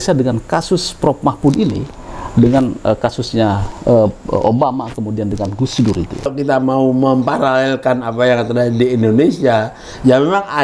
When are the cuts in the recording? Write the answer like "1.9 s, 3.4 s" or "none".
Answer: 6.3 s